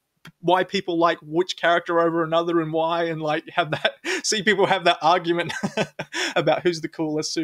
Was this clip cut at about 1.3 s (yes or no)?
no